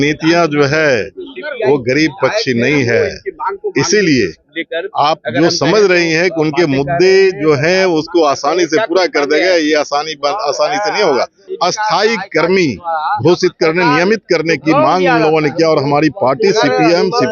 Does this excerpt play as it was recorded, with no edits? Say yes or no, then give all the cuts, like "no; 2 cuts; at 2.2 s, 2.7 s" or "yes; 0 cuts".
no; 1 cut; at 11.4 s